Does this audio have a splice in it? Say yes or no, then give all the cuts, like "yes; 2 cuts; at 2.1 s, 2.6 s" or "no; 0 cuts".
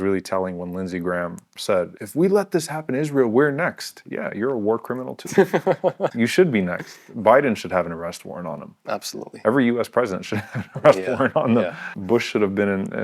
yes; 3 cuts; at 1.6 s, 6.1 s, 11.9 s